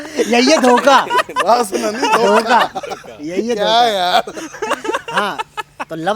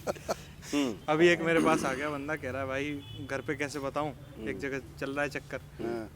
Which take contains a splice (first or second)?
second